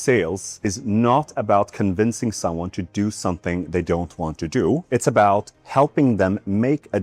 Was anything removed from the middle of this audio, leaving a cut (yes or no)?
yes